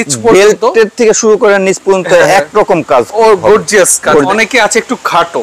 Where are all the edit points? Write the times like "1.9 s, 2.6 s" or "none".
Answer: 4.3 s